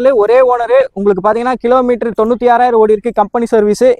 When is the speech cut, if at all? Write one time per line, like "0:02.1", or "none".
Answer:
none